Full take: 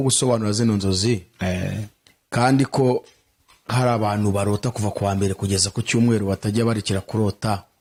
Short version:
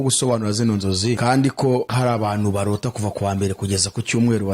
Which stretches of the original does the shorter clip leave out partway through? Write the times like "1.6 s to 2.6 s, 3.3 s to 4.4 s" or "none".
1.2 s to 2.3 s, 3.1 s to 3.7 s